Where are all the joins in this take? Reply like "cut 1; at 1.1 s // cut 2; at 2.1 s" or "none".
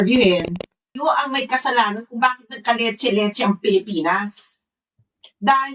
cut 1; at 0.9 s